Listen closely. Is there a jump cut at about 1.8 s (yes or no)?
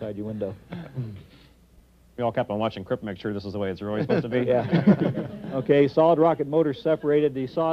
yes